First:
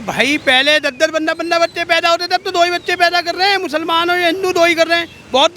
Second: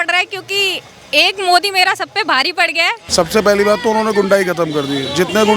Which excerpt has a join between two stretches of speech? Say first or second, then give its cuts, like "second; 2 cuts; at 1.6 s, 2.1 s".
second; 1 cut; at 3.0 s